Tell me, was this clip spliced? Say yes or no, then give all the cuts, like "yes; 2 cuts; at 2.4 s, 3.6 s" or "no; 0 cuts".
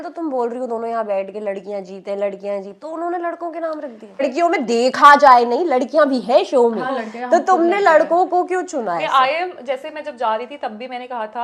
no; 0 cuts